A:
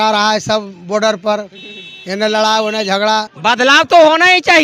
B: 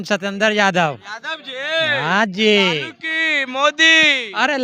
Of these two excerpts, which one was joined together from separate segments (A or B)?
A